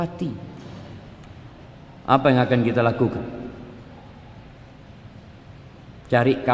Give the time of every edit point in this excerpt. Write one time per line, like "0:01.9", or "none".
0:01.6